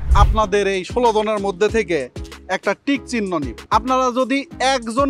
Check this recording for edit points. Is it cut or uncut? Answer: cut